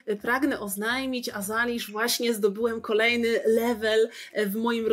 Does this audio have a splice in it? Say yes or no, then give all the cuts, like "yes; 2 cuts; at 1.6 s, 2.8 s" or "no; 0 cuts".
no; 0 cuts